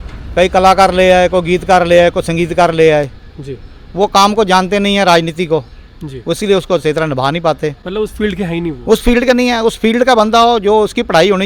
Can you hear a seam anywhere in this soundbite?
no; 0 cuts

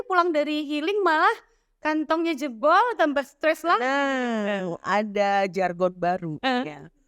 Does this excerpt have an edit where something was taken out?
no; 0 cuts

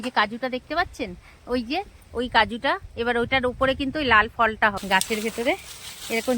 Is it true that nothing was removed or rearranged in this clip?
no; 1 cut; at 4.8 s

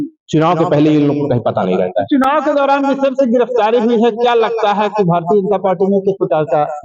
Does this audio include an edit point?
no; 0 cuts

